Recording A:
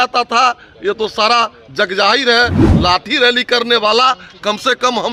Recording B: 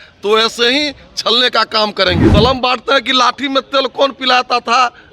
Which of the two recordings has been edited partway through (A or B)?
B